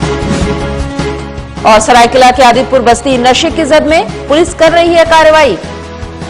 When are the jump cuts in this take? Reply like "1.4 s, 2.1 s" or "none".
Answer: 1.1 s